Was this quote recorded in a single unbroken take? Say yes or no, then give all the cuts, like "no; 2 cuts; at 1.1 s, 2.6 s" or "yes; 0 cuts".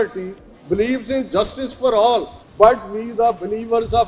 no; 1 cut; at 2.4 s